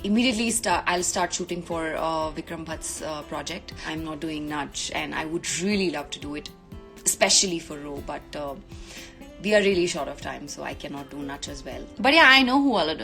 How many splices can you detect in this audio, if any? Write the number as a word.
two